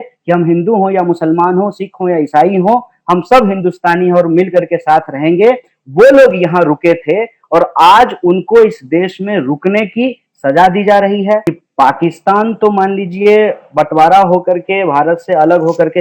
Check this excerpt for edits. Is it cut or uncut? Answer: cut